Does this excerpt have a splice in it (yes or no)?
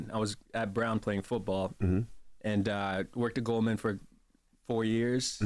no